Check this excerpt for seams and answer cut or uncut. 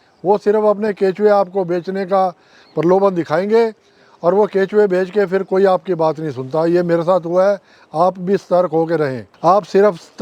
cut